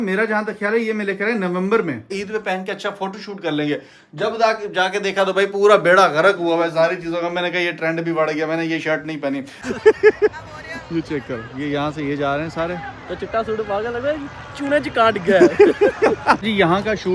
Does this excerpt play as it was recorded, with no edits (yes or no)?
no